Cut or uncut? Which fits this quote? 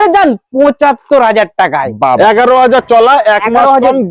cut